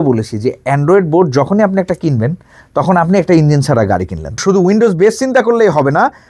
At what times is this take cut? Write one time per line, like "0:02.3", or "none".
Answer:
0:04.4